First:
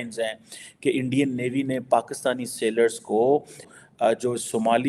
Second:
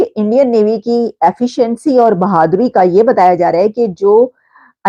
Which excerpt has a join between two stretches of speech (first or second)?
first